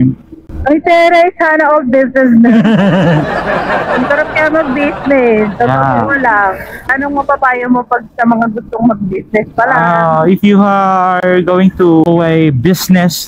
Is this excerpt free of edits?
no; 2 cuts; at 7.0 s, 12.1 s

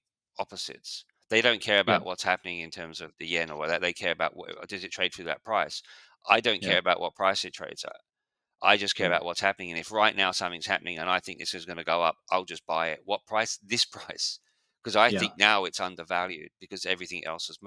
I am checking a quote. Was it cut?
no; 0 cuts

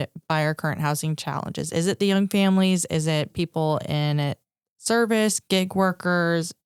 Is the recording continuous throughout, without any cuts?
yes; 0 cuts

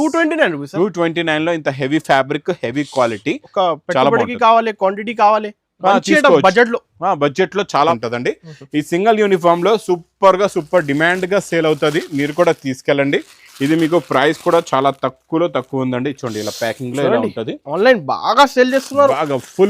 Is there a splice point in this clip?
yes; 1 cut; at 7.9 s

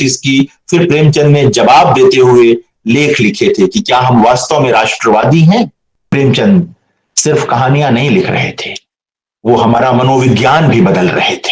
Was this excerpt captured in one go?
no; 1 cut; at 6.1 s

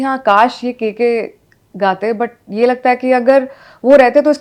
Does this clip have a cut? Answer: no; 0 cuts

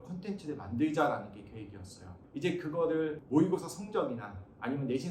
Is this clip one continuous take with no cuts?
no; 1 cut; at 2.2 s

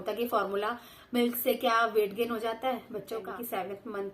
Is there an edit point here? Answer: yes; 1 cut; at 3.3 s

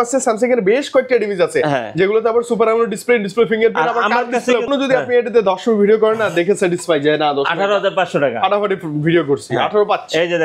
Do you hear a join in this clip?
yes; 1 cut; at 4.7 s

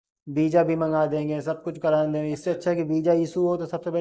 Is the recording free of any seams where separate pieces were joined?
yes; 0 cuts

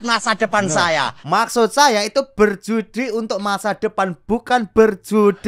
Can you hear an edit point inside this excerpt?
yes; 1 cut; at 1.2 s

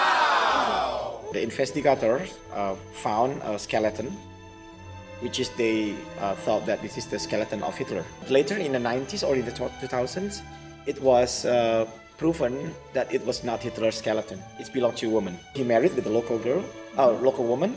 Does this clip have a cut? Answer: yes; 3 cuts; at 1.3 s, 8.2 s, 15.5 s

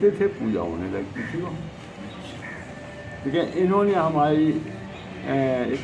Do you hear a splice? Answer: no; 0 cuts

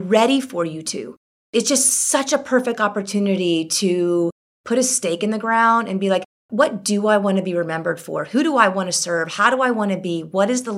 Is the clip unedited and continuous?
yes; 0 cuts

